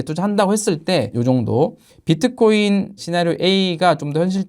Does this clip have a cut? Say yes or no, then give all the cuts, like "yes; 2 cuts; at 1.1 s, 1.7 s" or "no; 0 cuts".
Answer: yes; 2 cuts; at 1.1 s, 3.0 s